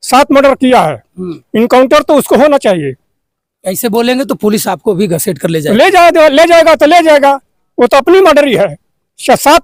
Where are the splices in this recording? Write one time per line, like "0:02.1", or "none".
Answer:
none